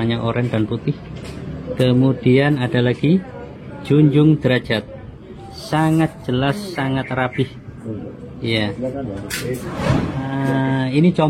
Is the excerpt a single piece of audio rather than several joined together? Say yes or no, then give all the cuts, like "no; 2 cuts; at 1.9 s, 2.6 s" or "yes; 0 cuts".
no; 1 cut; at 10.2 s